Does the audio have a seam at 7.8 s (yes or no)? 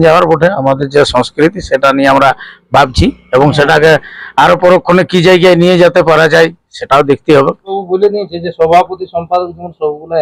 yes